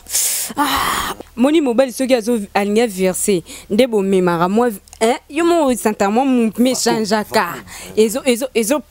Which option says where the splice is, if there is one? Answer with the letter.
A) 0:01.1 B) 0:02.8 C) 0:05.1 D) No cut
A